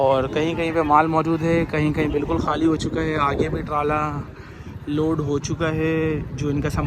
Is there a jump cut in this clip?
no; 0 cuts

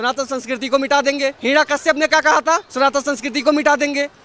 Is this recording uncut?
no; 2 cuts; at 1.4 s, 2.7 s

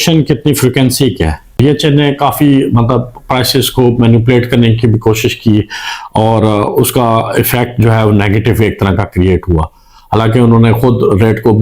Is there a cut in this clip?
yes; 1 cut; at 1.6 s

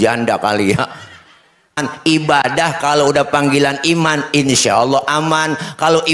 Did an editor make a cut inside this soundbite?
yes; 1 cut; at 1.9 s

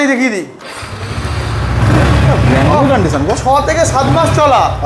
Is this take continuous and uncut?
yes; 0 cuts

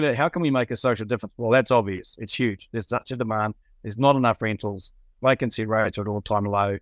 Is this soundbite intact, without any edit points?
yes; 0 cuts

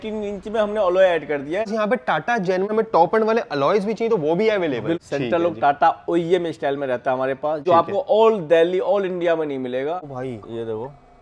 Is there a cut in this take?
yes; 5 cuts; at 1.7 s, 2.7 s, 5.0 s, 7.6 s, 10.1 s

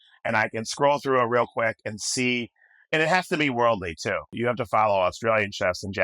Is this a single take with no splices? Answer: no; 1 cut; at 4.3 s

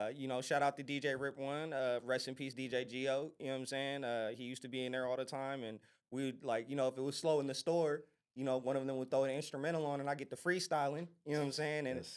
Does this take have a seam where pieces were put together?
no; 0 cuts

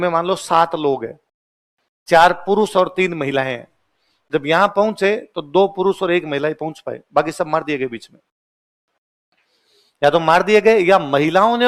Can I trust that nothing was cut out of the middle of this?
yes; 0 cuts

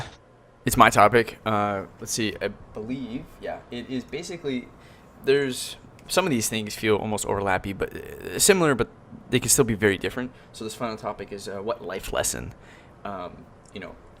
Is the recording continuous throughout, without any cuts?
no; 1 cut; at 2.0 s

